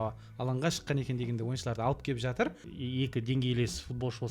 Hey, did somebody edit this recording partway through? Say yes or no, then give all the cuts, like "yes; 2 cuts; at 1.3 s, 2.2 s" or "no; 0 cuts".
yes; 1 cut; at 2.7 s